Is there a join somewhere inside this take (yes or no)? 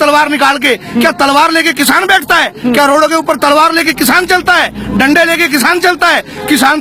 no